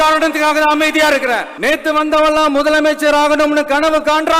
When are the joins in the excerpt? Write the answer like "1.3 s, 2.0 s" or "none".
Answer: 1.5 s